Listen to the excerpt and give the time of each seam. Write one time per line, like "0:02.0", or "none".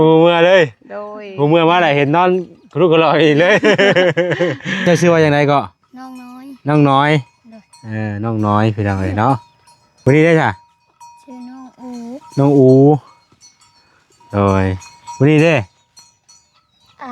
0:04.8